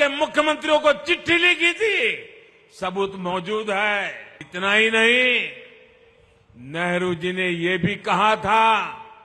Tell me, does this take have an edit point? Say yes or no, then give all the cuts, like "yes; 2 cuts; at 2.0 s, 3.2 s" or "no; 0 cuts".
yes; 1 cut; at 4.5 s